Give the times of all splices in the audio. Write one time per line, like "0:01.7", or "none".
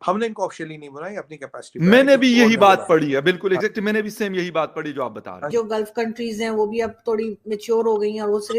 0:05.5